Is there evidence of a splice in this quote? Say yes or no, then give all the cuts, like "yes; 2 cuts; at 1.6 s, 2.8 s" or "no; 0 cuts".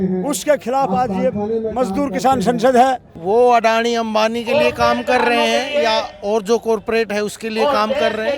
yes; 1 cut; at 3.1 s